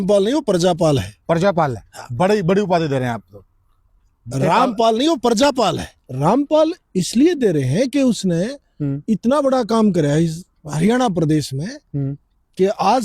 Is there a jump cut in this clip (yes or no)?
yes